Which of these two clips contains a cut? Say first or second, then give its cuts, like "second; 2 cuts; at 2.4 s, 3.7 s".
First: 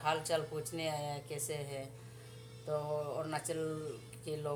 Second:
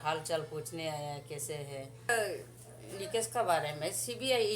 second; 1 cut; at 2.1 s